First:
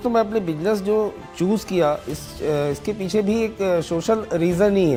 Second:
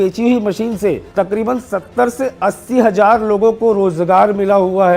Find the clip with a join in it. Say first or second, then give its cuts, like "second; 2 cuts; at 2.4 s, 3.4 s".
second; 1 cut; at 1.0 s